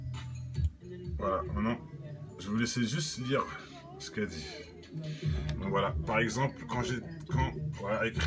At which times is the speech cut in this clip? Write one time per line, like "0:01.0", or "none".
none